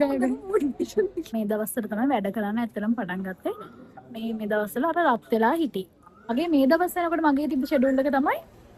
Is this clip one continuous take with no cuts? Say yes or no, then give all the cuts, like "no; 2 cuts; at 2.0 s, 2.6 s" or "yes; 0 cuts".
no; 2 cuts; at 1.3 s, 6.3 s